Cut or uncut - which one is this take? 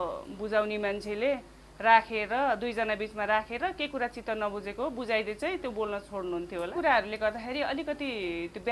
cut